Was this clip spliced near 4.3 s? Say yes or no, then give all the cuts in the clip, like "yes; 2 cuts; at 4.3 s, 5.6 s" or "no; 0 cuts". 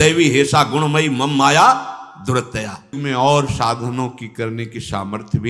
no; 1 cut; at 3.0 s